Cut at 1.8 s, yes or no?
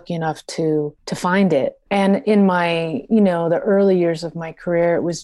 yes